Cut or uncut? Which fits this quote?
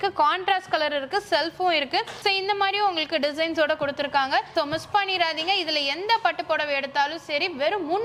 uncut